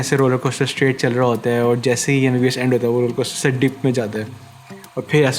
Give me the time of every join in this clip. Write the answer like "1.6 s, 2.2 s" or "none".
none